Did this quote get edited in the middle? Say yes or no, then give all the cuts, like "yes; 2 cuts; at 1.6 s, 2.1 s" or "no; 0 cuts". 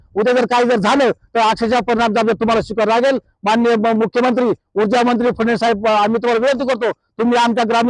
no; 0 cuts